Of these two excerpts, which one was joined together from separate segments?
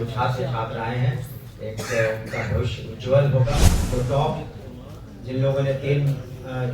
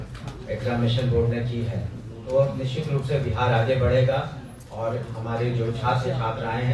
first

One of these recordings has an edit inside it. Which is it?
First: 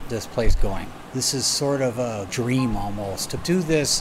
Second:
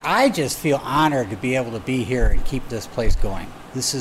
first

